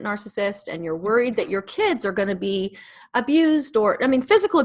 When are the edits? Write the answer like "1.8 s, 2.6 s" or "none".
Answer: none